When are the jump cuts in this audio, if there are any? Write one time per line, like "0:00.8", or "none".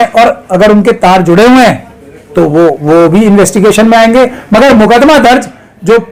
none